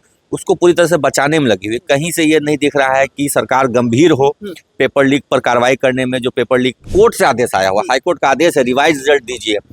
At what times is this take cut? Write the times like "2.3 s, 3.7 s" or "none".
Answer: 6.9 s